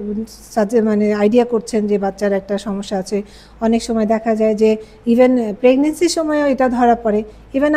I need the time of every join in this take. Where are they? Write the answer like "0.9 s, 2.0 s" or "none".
none